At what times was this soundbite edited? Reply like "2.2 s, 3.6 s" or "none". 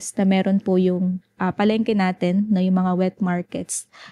none